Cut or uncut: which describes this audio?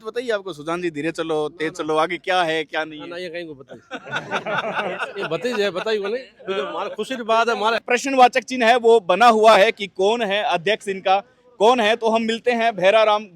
cut